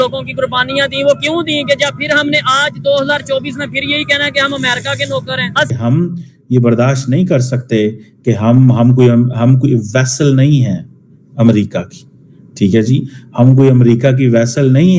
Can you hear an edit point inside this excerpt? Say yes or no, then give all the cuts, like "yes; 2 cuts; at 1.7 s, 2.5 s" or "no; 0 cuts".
yes; 1 cut; at 5.7 s